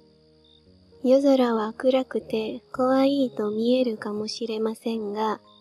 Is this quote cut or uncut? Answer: cut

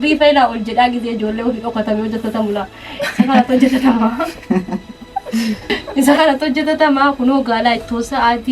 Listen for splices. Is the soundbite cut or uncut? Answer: cut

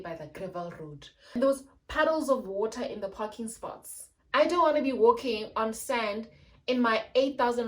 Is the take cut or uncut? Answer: cut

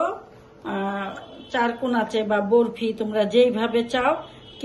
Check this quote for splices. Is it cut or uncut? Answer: uncut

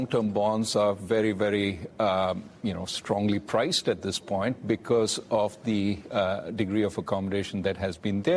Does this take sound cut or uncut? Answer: cut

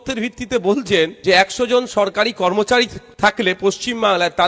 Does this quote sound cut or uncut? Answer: cut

